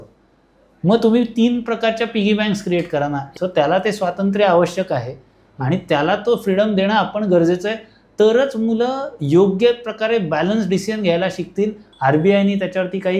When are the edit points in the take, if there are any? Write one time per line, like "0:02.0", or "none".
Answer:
0:03.3
0:11.9